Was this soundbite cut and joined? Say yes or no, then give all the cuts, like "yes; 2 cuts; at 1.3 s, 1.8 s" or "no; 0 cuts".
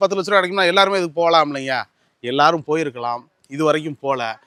no; 0 cuts